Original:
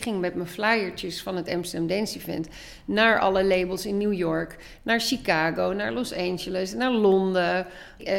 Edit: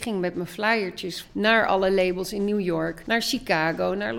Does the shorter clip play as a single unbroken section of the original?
no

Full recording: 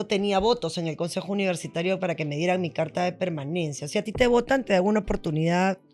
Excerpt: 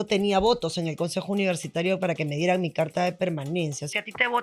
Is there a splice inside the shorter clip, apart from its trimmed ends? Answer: no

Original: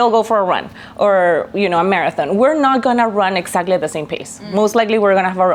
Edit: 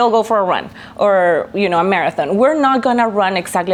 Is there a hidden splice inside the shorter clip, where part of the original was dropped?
no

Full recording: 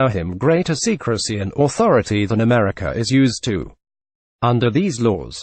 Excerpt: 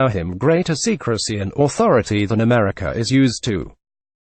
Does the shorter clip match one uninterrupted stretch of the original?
yes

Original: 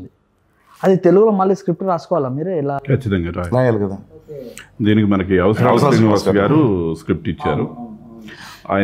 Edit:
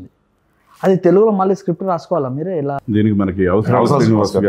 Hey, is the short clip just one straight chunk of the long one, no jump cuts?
no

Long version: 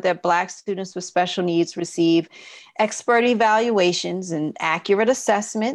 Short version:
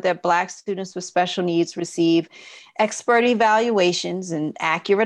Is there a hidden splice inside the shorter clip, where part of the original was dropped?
no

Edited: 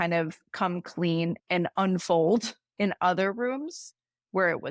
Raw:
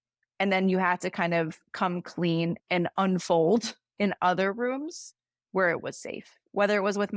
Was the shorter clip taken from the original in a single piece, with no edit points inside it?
yes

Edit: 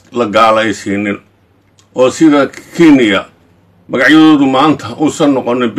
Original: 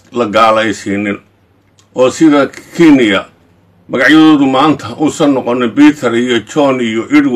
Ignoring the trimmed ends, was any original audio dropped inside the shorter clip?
no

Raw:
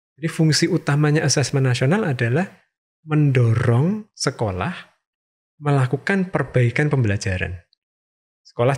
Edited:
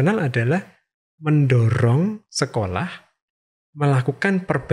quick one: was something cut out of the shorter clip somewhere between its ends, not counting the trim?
no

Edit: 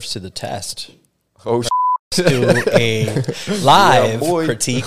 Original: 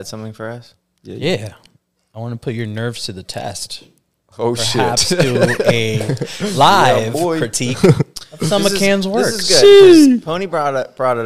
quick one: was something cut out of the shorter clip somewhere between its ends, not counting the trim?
no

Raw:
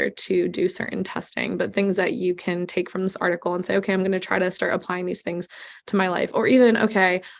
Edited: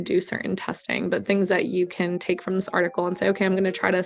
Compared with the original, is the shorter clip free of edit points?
yes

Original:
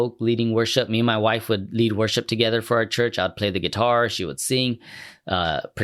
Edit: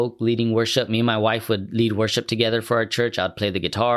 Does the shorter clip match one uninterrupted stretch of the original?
yes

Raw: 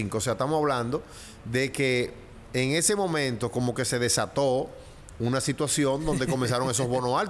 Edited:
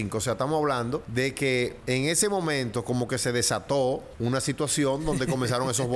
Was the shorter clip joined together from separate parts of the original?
yes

